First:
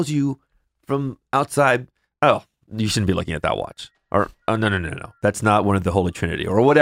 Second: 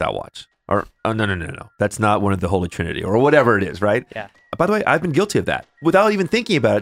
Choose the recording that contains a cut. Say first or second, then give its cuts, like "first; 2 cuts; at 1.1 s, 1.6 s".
second; 2 cuts; at 4.4 s, 5.8 s